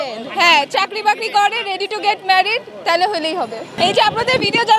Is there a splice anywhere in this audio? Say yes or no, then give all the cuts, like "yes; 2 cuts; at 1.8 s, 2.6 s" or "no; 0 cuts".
yes; 1 cut; at 3.7 s